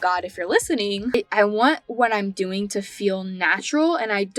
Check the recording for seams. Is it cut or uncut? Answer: cut